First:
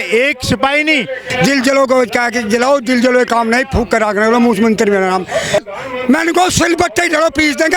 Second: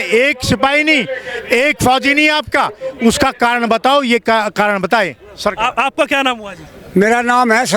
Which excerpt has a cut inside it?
first; 2 cuts; at 1.2 s, 5.6 s

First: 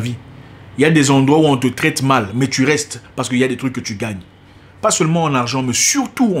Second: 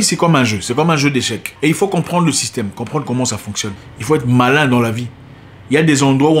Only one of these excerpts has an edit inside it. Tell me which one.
second; 1 cut; at 3.8 s

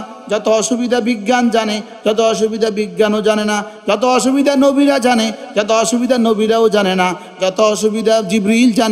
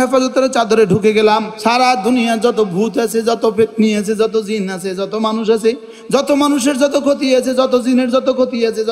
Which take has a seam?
second; 1 cut; at 1.5 s

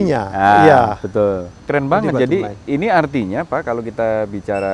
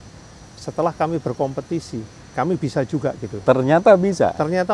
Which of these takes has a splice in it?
first; 1 cut; at 1.5 s

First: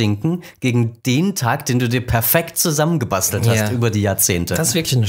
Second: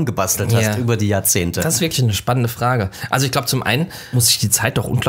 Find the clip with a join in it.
second; 1 cut; at 4.0 s

